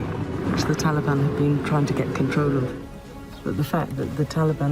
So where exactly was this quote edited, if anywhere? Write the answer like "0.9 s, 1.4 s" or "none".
2.8 s